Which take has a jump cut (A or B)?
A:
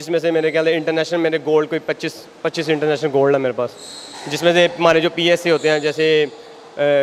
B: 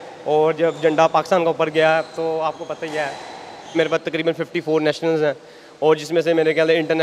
B